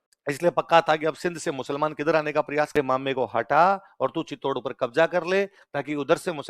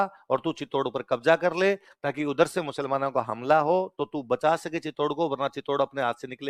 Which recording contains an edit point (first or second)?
first